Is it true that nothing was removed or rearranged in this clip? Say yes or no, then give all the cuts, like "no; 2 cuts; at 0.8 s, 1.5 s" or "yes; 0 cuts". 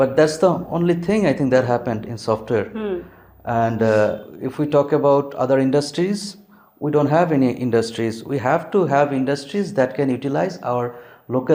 yes; 0 cuts